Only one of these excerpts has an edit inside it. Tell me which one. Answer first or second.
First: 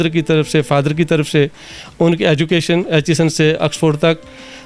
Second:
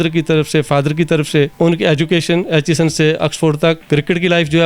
second